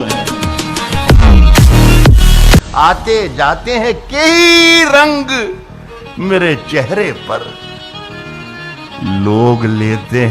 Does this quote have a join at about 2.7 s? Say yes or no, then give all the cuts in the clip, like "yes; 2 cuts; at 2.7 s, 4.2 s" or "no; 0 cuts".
yes; 1 cut; at 2.7 s